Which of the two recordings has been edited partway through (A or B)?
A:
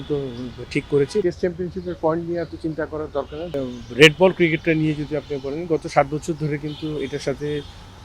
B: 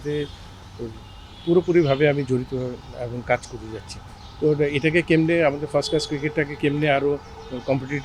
A